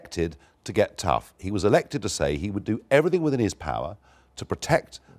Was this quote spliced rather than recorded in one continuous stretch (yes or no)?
yes